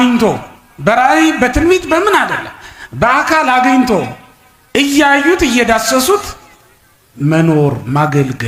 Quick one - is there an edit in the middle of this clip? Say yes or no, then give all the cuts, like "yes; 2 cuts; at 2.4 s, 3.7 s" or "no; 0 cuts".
no; 0 cuts